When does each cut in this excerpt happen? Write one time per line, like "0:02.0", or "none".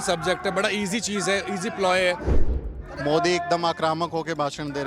0:02.6